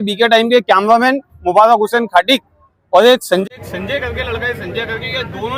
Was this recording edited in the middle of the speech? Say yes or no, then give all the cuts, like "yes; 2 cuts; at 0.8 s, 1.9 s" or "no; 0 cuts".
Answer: no; 0 cuts